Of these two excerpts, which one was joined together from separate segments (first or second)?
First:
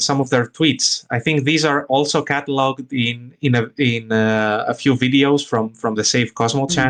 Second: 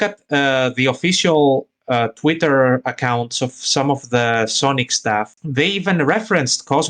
second